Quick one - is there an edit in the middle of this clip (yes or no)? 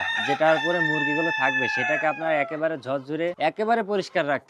yes